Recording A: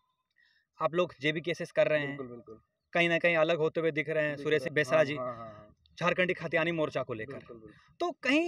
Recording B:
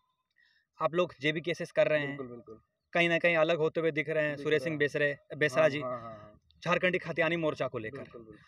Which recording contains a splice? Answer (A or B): A